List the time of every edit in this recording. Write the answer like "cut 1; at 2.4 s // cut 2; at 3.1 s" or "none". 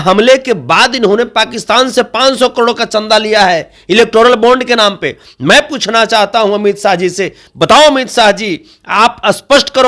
none